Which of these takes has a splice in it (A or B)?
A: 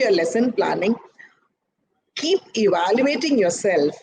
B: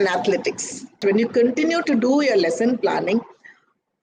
B